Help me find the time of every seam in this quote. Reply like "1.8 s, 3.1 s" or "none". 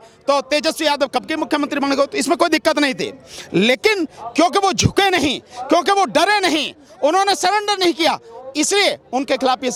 none

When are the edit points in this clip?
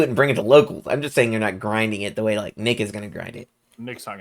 none

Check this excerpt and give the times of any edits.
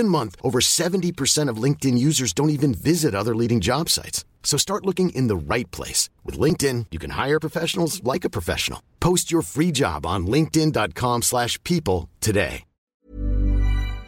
12.7 s

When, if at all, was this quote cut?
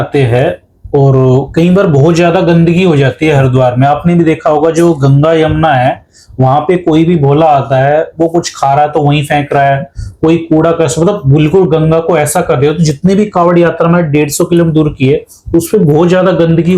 none

